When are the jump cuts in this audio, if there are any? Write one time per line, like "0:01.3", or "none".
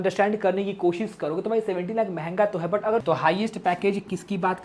0:03.0